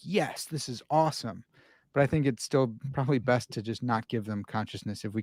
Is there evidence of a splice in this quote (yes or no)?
no